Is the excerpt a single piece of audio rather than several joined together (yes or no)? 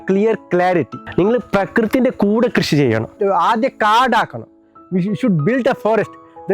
no